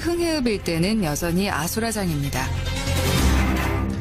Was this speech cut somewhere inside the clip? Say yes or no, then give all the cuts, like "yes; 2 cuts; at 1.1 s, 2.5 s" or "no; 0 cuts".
no; 0 cuts